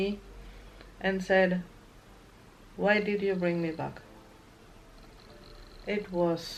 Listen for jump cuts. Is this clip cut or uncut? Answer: uncut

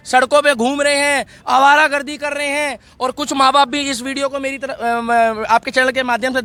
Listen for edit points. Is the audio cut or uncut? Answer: uncut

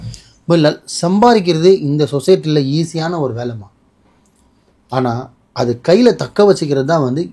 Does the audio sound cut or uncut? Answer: uncut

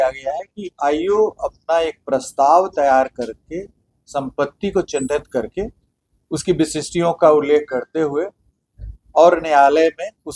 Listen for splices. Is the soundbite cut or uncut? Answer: uncut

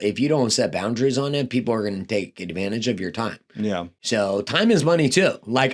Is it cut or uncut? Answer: uncut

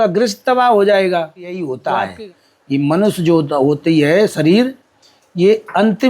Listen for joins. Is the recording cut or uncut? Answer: cut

